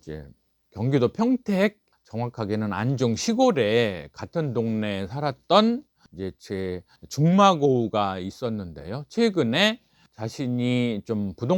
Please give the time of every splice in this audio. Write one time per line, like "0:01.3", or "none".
none